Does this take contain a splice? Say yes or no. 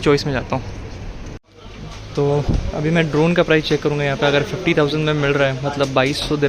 yes